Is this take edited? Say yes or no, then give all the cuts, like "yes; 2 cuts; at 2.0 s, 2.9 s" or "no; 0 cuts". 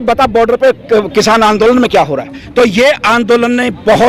yes; 1 cut; at 2.4 s